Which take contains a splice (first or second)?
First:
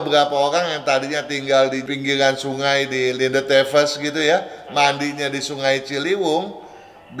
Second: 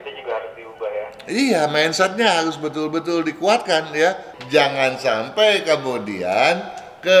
second